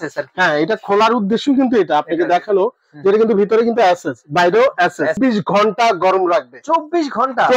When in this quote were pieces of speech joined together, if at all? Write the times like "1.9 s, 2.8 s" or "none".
5.2 s